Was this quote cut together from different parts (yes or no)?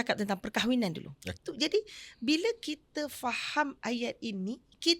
yes